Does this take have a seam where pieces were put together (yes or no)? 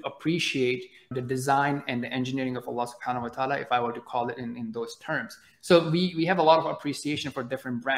yes